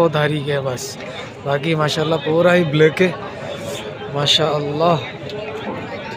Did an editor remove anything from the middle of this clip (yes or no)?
no